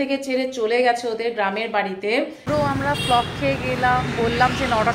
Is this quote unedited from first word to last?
no; 1 cut; at 2.5 s

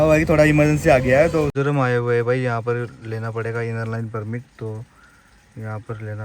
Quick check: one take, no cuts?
no; 1 cut; at 1.5 s

